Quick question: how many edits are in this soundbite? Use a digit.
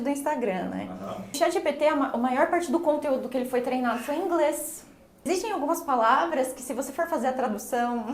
2